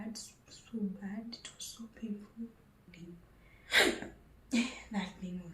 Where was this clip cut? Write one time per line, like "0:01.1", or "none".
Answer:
0:02.9

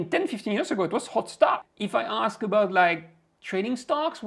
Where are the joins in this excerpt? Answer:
0:01.7

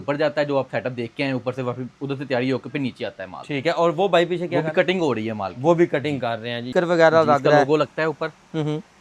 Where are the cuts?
0:06.7

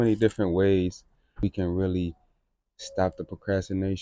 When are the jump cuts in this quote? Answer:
0:01.4

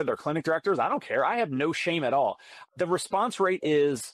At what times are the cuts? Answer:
0:02.5

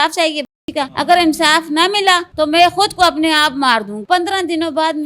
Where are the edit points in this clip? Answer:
0:00.9
0:02.3
0:04.0

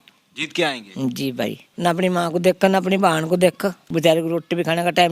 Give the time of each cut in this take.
0:01.6
0:03.8

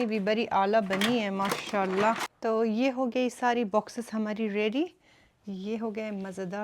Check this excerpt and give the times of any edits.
0:02.3

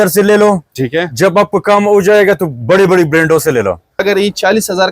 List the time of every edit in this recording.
0:04.0

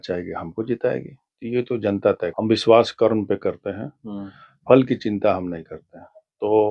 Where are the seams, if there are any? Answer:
0:02.3

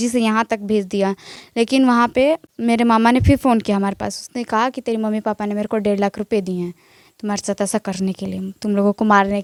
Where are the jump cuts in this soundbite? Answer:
none

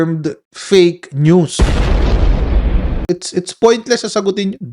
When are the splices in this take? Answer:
0:03.0

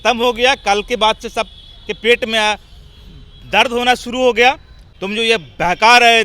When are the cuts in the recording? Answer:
0:04.8

